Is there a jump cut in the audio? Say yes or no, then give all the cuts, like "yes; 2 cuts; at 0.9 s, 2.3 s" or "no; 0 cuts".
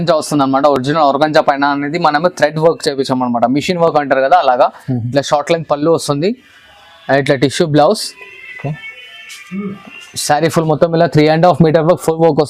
no; 0 cuts